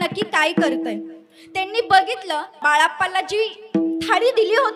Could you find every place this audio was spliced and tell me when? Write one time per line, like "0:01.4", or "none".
0:02.6

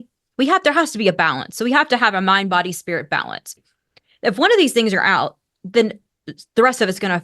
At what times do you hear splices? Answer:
0:03.7

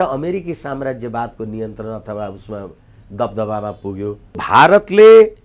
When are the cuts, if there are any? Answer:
0:04.4

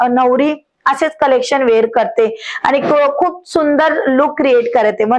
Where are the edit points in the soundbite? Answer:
none

